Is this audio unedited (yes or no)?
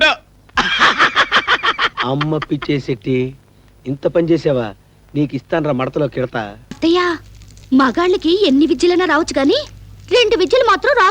no